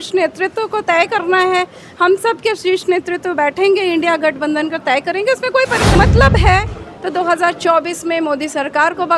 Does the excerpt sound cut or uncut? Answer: cut